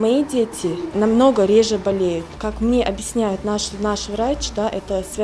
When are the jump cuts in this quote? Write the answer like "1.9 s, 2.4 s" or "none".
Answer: 0.9 s, 2.4 s